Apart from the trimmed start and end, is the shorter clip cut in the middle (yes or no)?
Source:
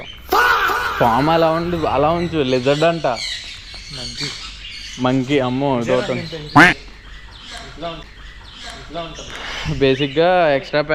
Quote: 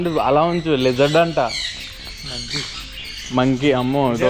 no